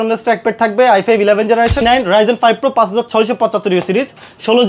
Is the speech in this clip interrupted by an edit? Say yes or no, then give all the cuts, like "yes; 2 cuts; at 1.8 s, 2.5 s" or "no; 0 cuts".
yes; 1 cut; at 1.8 s